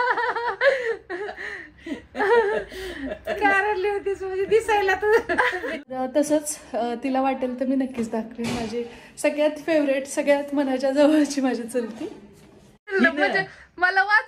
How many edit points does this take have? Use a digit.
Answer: 2